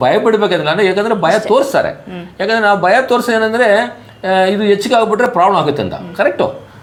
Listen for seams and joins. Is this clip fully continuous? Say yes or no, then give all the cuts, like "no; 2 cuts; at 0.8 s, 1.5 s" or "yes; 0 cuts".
yes; 0 cuts